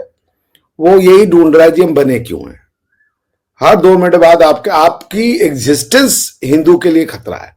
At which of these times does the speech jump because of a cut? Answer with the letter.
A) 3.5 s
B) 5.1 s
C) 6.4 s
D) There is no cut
D